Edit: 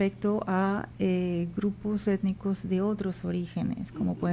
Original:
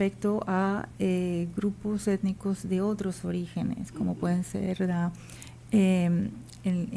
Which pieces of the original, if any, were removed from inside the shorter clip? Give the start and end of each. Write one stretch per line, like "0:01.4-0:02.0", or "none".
none